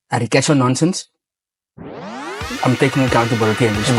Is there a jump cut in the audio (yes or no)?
no